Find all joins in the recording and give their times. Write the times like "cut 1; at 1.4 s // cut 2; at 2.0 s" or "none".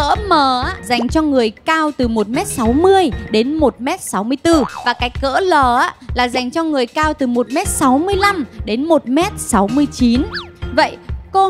none